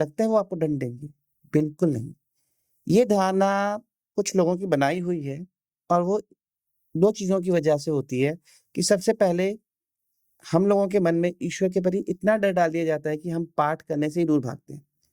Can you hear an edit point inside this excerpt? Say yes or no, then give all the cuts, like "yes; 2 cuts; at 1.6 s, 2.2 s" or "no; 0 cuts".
no; 0 cuts